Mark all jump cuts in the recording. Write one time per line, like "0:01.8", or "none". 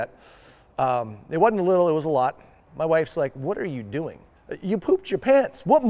0:02.6
0:04.5